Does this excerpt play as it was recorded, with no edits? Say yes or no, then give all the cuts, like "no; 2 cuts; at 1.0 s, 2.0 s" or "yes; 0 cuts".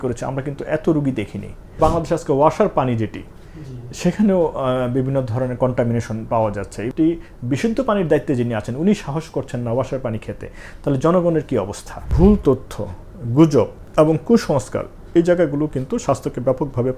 no; 3 cuts; at 1.8 s, 6.9 s, 12.1 s